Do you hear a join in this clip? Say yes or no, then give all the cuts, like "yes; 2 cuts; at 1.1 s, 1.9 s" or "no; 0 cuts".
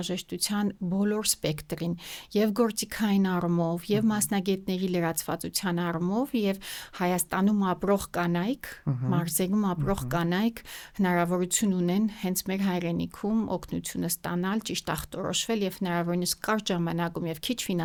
no; 0 cuts